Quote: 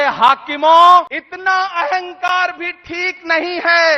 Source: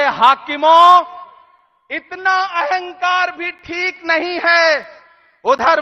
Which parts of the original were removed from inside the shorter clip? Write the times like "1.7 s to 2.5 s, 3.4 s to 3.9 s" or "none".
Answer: 1.2 s to 2.0 s

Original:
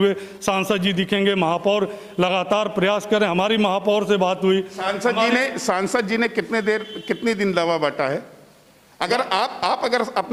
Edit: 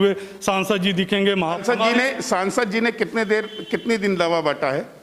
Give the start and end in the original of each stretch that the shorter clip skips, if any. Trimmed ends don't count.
1.6 s to 4.9 s

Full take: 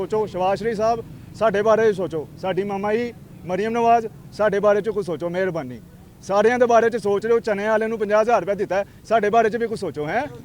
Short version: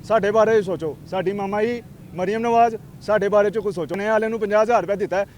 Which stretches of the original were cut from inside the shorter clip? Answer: 5.3 s to 7.6 s

